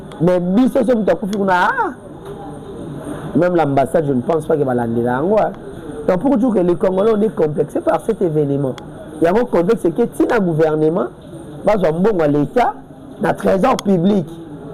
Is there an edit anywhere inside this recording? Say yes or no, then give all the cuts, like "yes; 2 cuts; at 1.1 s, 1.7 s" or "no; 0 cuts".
no; 0 cuts